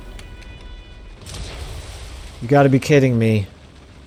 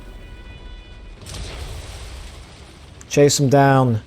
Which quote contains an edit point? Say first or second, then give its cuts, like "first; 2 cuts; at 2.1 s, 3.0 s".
second; 1 cut; at 2.4 s